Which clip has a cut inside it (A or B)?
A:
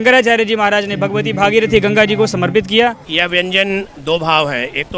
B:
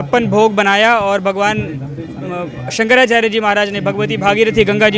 A